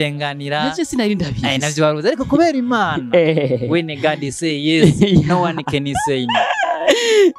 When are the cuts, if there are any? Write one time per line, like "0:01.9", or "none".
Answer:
none